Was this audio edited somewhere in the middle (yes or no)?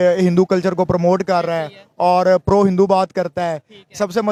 no